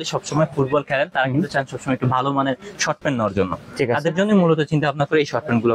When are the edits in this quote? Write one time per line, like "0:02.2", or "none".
none